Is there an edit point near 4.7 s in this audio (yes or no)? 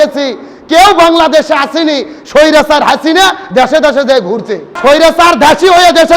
yes